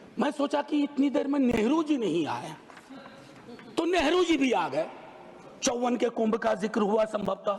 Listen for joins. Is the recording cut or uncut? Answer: uncut